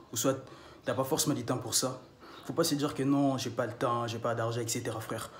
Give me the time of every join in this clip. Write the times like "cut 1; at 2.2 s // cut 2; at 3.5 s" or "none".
none